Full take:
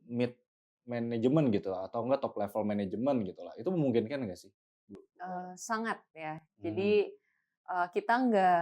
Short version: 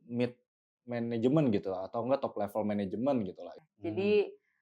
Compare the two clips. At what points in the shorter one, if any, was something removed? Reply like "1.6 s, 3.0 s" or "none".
3.5 s